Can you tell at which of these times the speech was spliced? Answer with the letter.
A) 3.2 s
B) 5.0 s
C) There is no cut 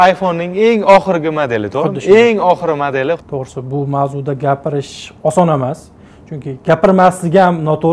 A